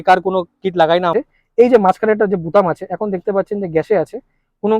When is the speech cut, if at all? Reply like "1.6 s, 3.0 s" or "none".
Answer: 1.1 s